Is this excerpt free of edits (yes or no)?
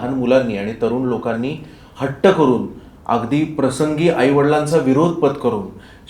yes